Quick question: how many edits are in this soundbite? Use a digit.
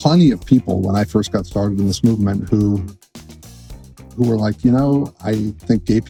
0